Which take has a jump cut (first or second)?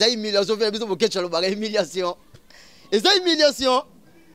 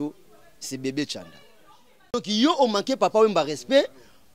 second